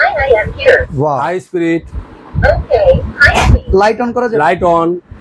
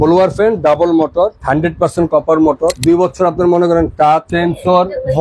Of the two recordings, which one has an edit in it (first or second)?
second